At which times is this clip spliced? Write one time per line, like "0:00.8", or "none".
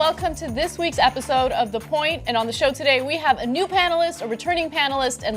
none